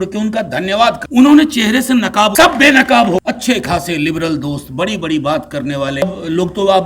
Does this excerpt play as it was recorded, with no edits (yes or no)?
no